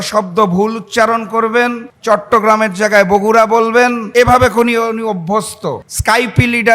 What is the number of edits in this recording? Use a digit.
3